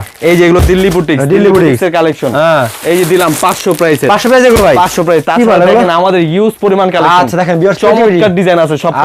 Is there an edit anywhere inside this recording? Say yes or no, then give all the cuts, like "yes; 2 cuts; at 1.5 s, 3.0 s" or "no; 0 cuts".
no; 0 cuts